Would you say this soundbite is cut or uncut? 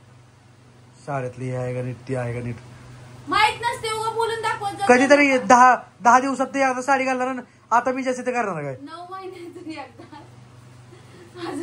uncut